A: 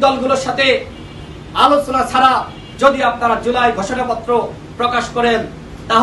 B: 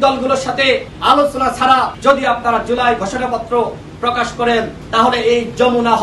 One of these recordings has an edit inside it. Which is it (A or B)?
B